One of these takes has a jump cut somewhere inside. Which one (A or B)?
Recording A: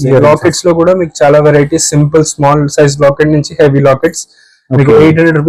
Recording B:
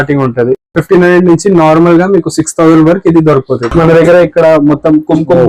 B